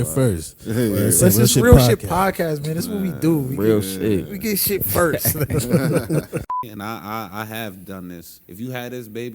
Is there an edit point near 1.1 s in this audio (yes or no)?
no